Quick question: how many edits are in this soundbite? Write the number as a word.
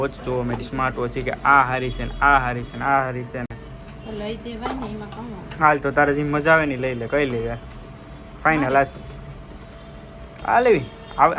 zero